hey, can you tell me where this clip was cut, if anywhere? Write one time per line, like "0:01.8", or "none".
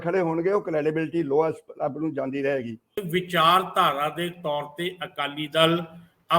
0:03.0